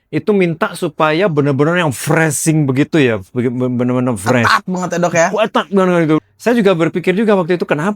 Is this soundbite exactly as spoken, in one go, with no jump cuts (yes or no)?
no